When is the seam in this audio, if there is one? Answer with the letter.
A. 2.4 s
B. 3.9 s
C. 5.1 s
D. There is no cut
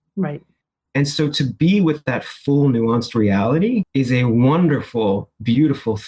B